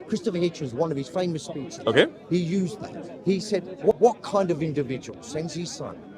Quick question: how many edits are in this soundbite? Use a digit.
1